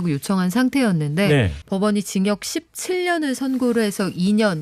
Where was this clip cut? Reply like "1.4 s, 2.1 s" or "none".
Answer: 1.6 s